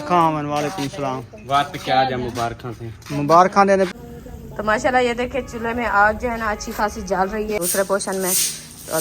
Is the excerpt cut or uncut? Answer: cut